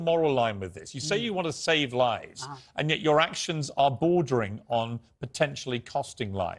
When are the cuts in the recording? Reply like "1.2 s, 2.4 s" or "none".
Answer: none